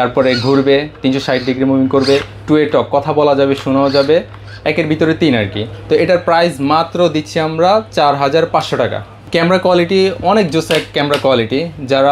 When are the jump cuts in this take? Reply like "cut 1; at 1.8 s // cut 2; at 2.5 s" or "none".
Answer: none

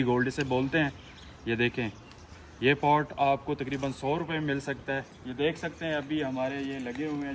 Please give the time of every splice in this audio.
cut 1; at 5.1 s

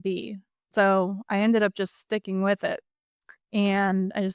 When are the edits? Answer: none

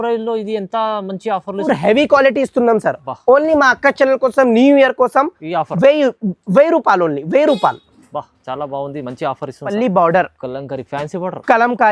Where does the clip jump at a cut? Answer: cut 1; at 1.7 s // cut 2; at 9.7 s

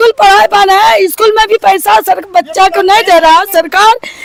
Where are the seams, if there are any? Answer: none

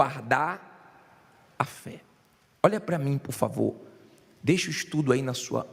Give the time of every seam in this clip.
cut 1; at 2.8 s

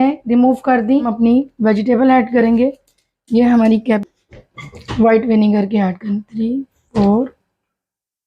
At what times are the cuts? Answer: cut 1; at 1.1 s // cut 2; at 4.0 s

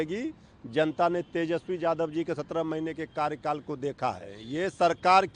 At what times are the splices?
cut 1; at 4.4 s

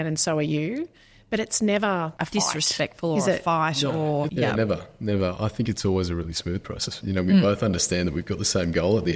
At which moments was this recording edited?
cut 1; at 2.2 s // cut 2; at 4.3 s // cut 3; at 6.9 s

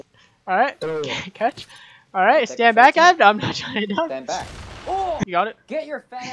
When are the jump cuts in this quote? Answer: cut 1; at 5.2 s

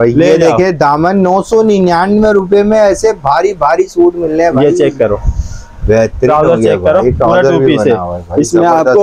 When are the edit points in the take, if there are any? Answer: none

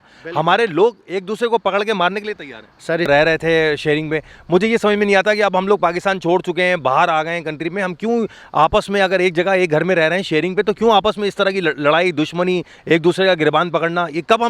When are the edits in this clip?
cut 1; at 3.0 s

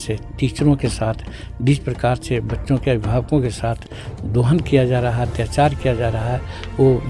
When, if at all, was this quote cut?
none

